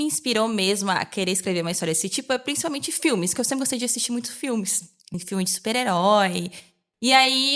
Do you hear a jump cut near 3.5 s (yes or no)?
no